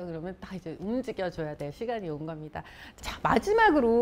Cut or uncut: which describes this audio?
cut